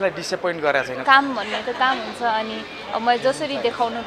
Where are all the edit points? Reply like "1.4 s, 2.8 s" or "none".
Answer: 0.9 s